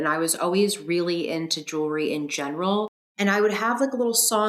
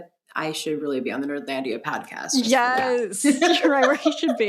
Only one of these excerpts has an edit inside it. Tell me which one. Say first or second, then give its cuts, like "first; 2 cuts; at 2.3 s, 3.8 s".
first; 1 cut; at 3.0 s